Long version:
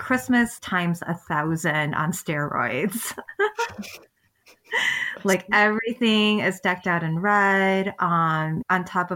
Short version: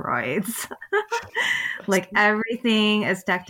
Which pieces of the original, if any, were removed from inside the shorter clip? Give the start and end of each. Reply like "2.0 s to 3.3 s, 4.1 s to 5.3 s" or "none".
3.7 s to 4.6 s